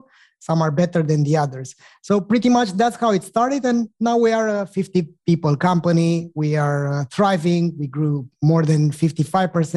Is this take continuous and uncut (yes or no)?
yes